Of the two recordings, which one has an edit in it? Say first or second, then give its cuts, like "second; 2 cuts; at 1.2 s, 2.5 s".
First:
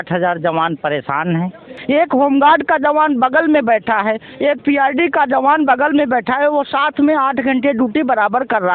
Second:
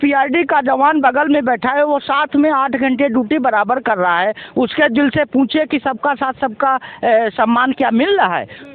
first; 1 cut; at 1.7 s